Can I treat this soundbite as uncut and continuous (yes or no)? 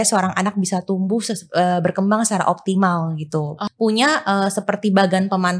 no